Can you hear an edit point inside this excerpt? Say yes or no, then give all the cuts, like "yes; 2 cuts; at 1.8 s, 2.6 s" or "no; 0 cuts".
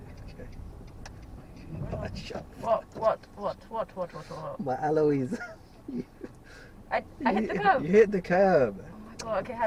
no; 0 cuts